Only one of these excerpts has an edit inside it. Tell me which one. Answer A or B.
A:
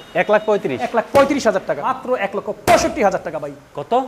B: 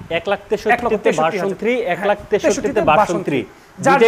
A